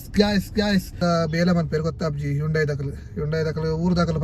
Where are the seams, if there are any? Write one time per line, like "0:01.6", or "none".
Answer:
0:01.0